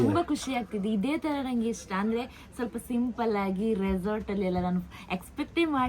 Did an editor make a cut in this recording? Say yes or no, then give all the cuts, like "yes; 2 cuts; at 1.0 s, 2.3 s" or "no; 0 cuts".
no; 0 cuts